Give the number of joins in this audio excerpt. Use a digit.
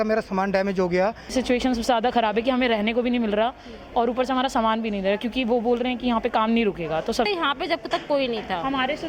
2